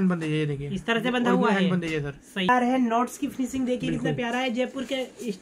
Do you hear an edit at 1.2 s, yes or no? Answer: no